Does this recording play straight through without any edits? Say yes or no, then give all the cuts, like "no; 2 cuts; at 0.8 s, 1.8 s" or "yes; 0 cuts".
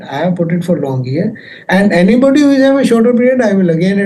yes; 0 cuts